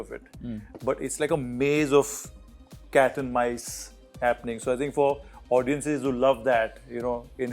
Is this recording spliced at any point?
no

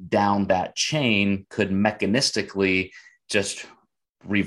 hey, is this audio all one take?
yes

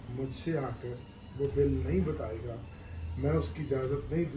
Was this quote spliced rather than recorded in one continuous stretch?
no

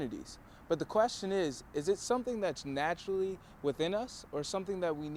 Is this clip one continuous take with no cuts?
yes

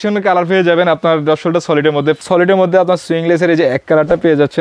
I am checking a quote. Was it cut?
yes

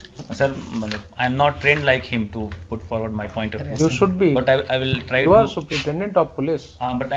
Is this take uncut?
yes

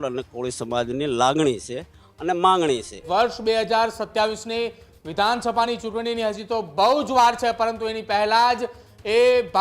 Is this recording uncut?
no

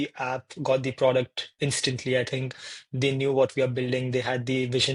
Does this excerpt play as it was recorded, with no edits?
yes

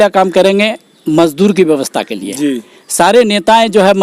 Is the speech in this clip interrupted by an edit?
no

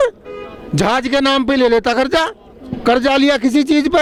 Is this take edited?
no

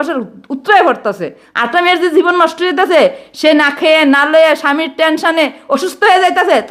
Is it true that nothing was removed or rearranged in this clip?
no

